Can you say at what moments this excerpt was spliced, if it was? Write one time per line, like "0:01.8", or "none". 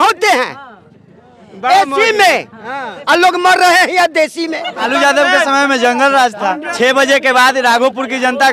0:04.9
0:06.7